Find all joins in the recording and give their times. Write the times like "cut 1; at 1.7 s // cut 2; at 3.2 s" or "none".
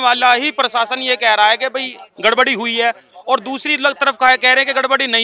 none